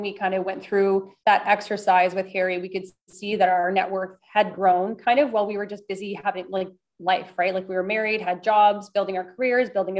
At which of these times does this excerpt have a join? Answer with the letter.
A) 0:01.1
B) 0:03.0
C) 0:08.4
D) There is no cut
A